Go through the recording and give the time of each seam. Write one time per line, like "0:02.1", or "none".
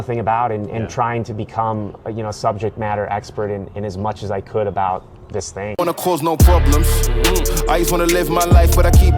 0:05.7